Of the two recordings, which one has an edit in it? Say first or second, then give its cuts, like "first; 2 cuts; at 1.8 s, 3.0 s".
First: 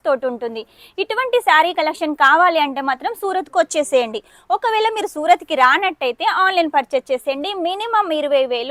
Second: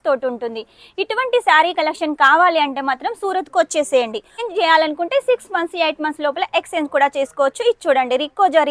second; 1 cut; at 4.4 s